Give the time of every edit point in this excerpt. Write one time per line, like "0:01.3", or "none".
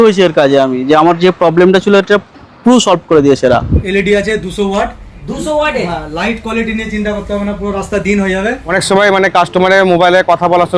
0:03.8
0:08.8